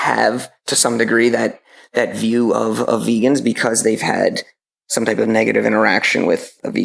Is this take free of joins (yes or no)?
yes